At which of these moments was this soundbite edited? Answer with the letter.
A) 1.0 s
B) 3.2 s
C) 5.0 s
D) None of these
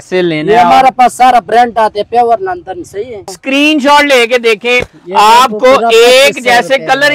B